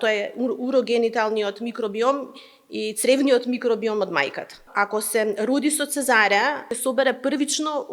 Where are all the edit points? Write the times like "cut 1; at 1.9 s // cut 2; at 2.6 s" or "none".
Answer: cut 1; at 4.6 s // cut 2; at 6.7 s